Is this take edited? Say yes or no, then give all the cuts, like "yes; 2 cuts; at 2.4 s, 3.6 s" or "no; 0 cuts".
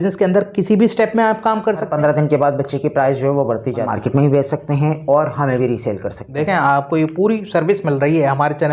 yes; 3 cuts; at 1.9 s, 3.9 s, 6.3 s